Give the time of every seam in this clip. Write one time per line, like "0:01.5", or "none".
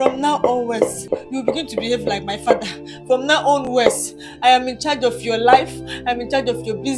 0:01.0